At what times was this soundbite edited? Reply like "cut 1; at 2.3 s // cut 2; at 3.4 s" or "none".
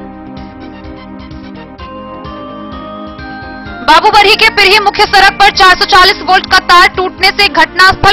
none